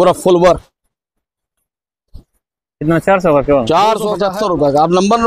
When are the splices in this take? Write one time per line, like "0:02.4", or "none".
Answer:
0:04.2